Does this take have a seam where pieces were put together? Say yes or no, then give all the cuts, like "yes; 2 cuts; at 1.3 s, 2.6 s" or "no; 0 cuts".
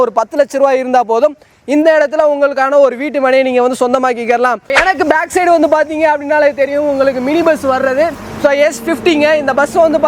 yes; 1 cut; at 4.7 s